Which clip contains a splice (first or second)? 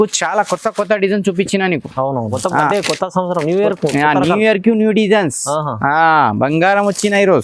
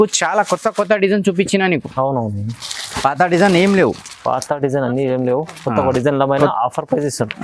first